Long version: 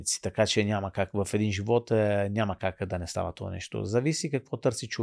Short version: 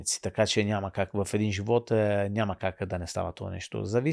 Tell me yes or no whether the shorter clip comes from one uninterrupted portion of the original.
yes